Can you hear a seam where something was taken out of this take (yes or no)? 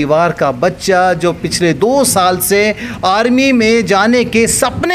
no